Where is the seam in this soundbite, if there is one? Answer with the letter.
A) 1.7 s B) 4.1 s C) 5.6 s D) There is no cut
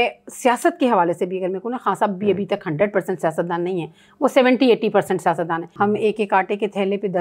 C